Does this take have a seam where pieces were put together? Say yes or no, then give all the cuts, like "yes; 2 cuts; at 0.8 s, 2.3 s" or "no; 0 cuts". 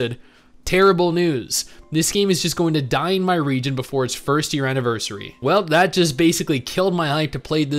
no; 0 cuts